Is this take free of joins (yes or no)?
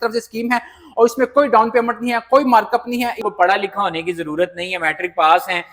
no